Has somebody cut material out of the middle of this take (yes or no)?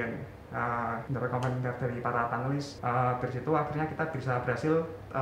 yes